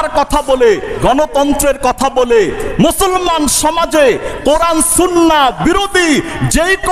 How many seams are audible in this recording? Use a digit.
1